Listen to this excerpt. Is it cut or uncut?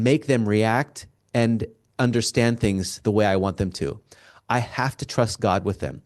uncut